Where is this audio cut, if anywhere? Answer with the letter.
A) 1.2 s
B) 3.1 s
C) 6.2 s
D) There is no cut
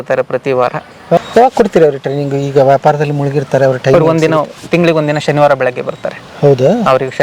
A